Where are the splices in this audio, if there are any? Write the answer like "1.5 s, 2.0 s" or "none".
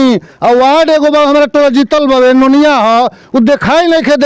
none